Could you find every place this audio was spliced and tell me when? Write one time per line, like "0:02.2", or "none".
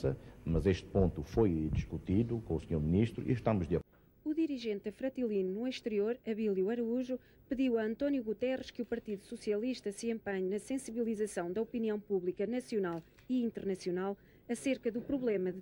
0:03.8